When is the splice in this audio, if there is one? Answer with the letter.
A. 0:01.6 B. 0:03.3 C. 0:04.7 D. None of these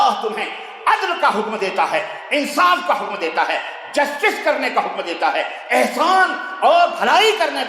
D